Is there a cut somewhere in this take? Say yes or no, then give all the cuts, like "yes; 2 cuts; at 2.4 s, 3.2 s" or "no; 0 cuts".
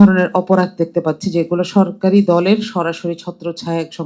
no; 0 cuts